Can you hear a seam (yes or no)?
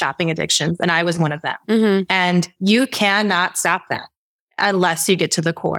no